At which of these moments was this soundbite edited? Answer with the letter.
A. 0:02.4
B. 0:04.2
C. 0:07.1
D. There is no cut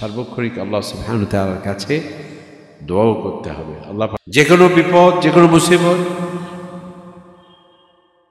B